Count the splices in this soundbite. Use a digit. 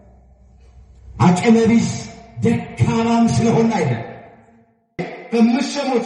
1